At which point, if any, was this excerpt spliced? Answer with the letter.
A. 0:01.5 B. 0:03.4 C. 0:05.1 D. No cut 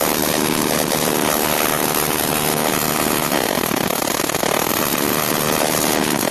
C